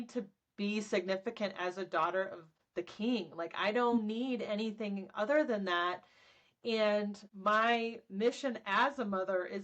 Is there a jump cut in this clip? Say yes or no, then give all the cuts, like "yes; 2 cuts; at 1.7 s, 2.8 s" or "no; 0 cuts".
no; 0 cuts